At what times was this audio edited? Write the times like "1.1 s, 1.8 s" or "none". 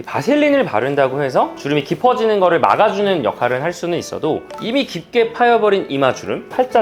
1.6 s, 4.5 s